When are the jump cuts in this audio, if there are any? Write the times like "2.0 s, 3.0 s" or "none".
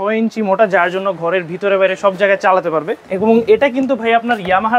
3.0 s